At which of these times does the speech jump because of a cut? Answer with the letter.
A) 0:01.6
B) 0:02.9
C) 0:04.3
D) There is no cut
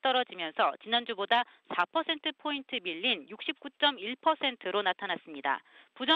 D